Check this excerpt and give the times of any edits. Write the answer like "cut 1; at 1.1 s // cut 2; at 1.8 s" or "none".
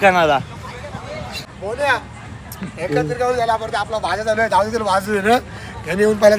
cut 1; at 1.4 s